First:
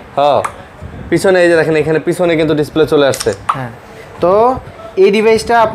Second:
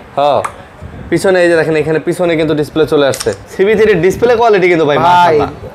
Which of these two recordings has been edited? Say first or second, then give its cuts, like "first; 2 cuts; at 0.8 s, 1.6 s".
second; 1 cut; at 3.4 s